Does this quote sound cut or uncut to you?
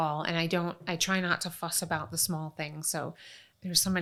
uncut